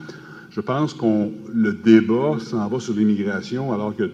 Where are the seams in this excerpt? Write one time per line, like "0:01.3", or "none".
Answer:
none